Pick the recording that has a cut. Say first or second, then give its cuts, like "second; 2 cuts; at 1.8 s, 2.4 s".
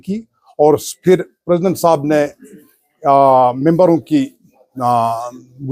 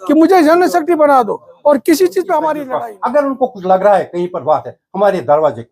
second; 1 cut; at 2.7 s